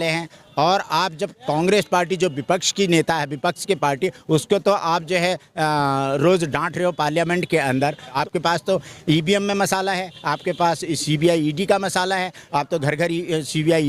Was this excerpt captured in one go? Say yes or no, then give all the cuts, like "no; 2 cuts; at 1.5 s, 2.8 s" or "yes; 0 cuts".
no; 1 cut; at 8.2 s